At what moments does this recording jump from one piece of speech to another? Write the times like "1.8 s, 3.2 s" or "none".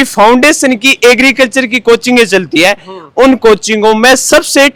none